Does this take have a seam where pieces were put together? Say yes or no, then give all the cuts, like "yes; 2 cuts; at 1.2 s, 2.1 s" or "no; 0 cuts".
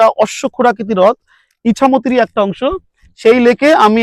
no; 0 cuts